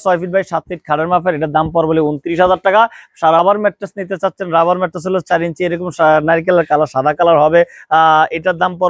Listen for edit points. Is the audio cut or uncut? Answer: cut